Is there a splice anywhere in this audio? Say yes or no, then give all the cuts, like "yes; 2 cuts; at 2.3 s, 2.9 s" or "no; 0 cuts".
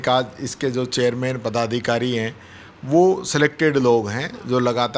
no; 0 cuts